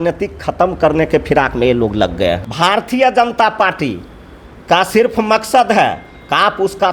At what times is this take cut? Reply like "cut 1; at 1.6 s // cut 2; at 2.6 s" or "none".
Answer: cut 1; at 2.5 s

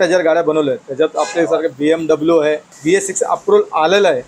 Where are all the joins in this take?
cut 1; at 2.7 s

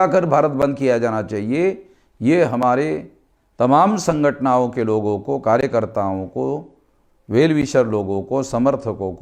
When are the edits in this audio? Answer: none

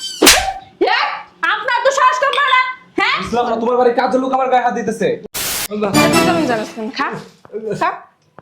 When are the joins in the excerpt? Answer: cut 1; at 5.3 s

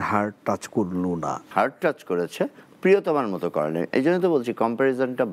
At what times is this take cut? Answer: cut 1; at 1.4 s

